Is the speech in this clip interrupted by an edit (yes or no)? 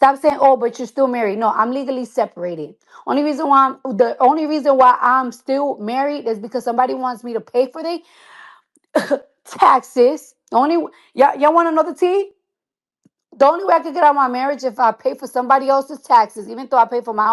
no